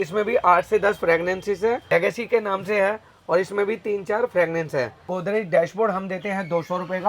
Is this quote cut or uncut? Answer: cut